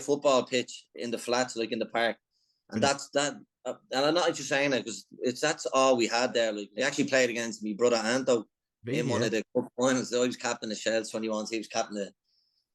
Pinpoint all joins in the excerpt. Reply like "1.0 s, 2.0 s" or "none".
6.7 s